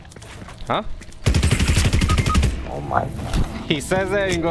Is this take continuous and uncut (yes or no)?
yes